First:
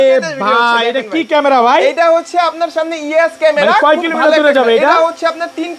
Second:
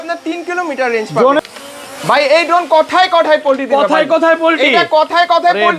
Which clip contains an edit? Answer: second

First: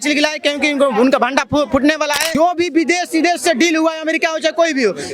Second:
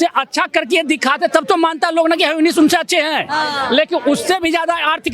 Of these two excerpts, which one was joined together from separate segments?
first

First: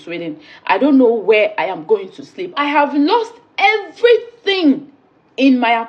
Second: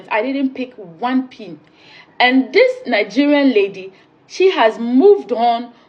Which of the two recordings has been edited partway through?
first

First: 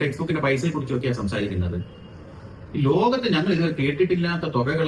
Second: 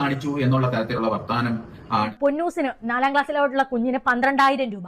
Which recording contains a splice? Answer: second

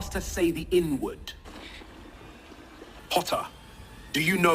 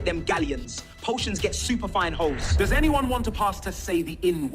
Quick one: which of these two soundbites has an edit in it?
second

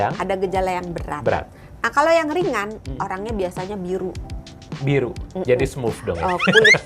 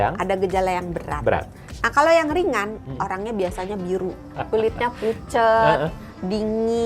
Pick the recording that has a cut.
second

